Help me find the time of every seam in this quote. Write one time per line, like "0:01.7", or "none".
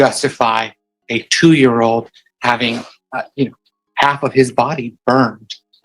0:03.0